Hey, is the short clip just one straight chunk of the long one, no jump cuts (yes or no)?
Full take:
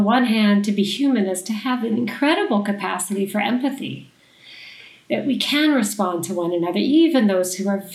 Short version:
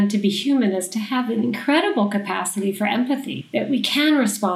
no